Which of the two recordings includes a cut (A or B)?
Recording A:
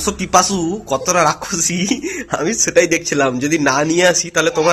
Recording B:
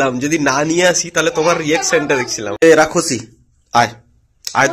B